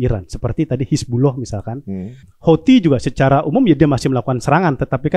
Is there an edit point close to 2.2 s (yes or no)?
yes